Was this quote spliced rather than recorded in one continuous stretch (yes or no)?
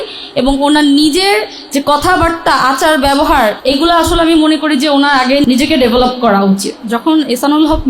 yes